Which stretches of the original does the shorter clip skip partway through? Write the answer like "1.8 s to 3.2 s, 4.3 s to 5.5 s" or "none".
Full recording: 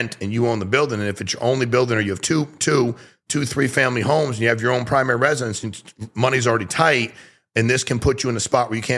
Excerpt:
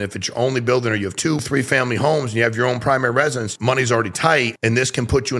2.5 s to 3.5 s, 5.5 s to 6.0 s, 7.1 s to 7.5 s